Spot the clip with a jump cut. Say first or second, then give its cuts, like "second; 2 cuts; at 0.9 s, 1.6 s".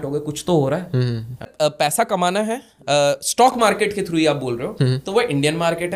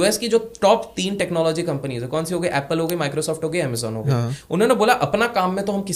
first; 1 cut; at 1.5 s